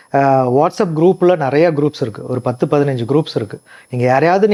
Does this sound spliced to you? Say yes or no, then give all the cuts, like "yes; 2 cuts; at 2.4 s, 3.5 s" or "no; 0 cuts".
no; 0 cuts